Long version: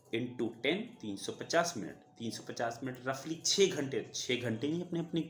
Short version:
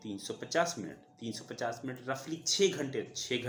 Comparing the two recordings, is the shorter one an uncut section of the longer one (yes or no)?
yes